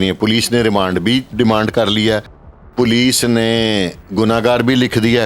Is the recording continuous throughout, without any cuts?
no; 2 cuts; at 1.3 s, 4.0 s

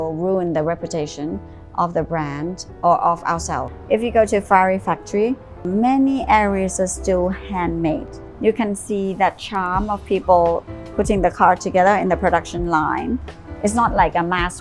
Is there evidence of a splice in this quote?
yes; 4 cuts; at 3.7 s, 5.7 s, 8.3 s, 13.3 s

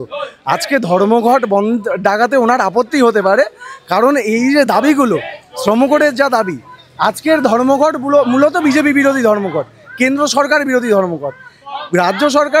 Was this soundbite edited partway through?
no; 0 cuts

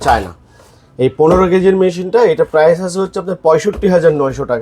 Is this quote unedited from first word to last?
yes; 0 cuts

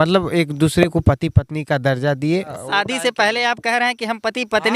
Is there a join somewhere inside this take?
yes; 1 cut; at 2.5 s

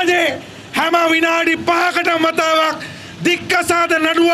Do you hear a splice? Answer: no; 0 cuts

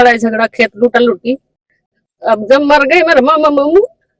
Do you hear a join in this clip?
no; 0 cuts

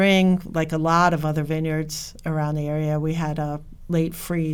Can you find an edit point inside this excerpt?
no; 0 cuts

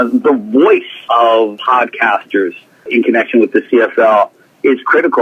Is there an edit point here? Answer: yes; 1 cut; at 1.3 s

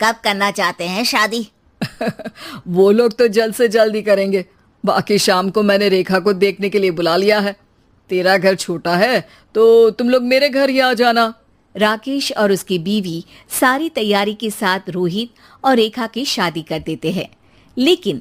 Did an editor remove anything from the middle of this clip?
no; 0 cuts

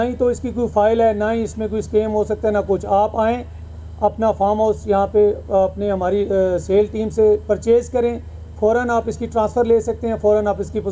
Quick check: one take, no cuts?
yes; 0 cuts

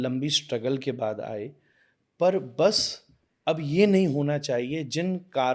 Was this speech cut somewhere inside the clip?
no; 0 cuts

